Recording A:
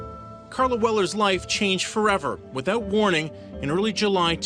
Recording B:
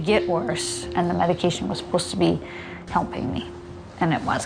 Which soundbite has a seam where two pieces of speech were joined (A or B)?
A